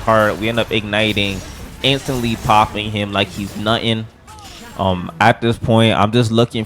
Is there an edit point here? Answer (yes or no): no